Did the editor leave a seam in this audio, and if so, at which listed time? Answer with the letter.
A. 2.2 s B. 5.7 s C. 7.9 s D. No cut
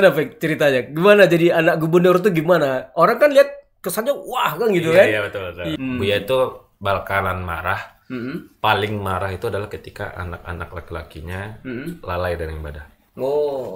B